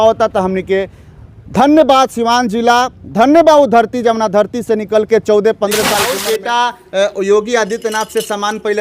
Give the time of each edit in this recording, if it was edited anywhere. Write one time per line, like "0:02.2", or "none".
0:06.0

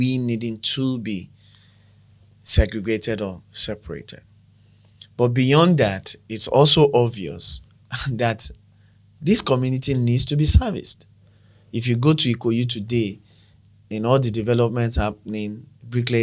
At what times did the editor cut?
none

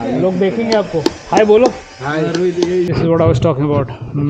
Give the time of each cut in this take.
0:02.9

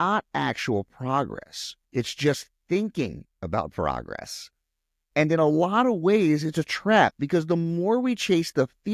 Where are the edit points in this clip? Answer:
none

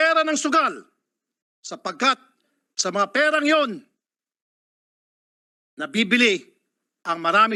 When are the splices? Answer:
none

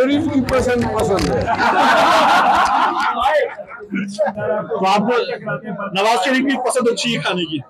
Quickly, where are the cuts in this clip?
0:04.4

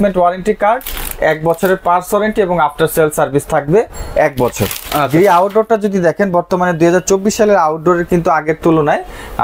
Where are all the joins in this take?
none

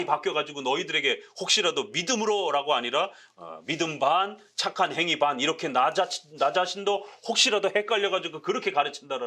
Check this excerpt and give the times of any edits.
none

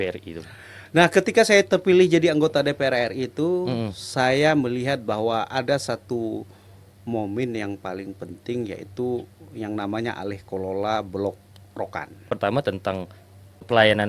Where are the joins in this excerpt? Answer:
0:12.3

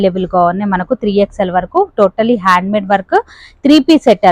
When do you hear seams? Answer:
none

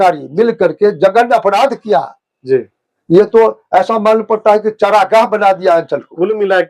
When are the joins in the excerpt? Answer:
none

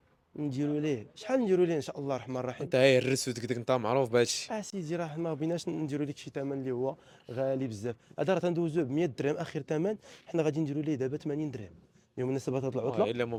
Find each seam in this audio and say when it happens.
none

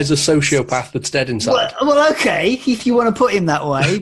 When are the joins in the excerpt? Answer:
none

